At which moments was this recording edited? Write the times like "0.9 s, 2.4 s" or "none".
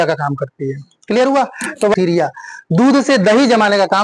1.9 s